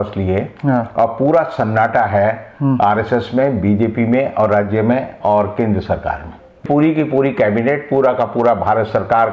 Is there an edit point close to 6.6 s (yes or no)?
yes